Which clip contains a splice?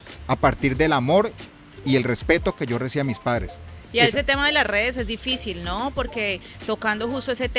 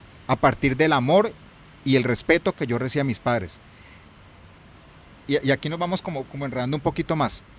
first; 1 cut; at 3.8 s

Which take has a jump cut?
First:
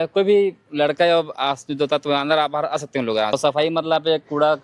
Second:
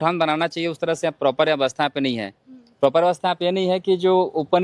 first; 1 cut; at 3.3 s

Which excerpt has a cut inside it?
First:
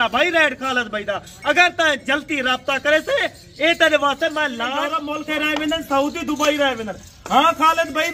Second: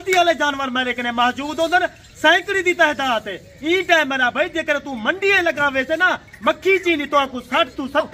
first; 1 cut; at 5.1 s

